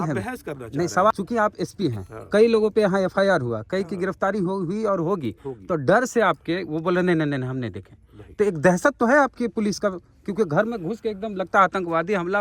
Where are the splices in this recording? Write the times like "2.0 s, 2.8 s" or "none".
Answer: 1.1 s